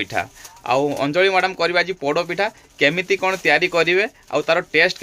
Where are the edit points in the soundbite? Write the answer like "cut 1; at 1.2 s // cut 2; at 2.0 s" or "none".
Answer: none